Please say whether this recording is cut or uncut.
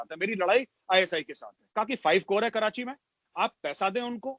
cut